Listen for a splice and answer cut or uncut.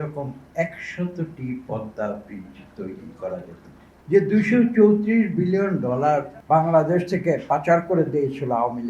cut